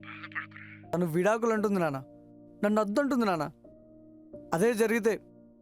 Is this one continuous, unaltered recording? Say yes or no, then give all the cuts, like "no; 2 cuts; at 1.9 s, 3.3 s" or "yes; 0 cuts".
no; 1 cut; at 0.9 s